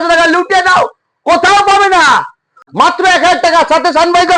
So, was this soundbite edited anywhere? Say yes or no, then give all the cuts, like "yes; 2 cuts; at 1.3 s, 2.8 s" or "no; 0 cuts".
yes; 1 cut; at 2.6 s